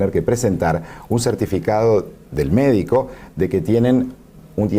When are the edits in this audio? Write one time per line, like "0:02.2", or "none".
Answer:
0:01.4